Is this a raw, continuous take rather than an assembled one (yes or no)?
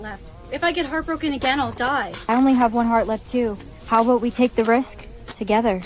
yes